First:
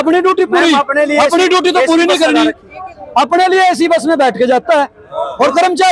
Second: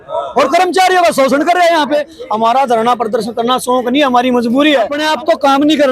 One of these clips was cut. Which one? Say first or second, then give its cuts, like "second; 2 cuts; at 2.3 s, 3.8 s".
second; 2 cuts; at 2.2 s, 5.0 s